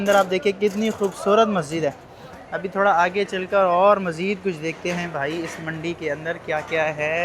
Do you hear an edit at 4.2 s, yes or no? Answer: no